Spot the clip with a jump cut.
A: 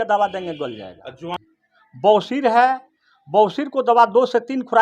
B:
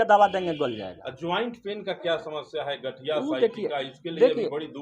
A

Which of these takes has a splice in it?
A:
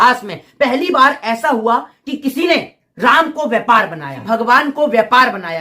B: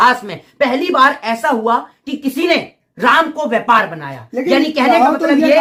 A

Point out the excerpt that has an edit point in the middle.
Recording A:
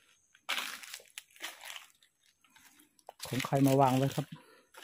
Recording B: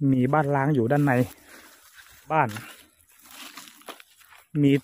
B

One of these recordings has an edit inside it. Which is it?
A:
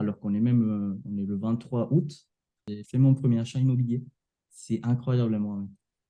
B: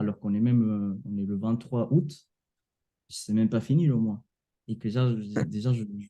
A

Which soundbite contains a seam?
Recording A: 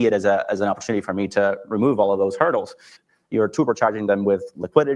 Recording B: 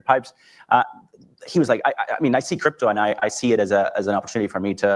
A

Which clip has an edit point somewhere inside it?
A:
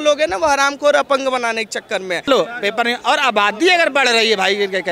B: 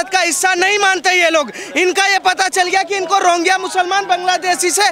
A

